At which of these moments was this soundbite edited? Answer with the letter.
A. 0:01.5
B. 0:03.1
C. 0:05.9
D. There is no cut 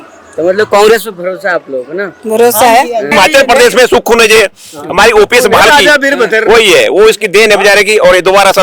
B